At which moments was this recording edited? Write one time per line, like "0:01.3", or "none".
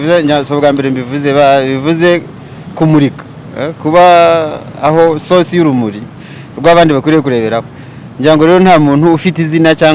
none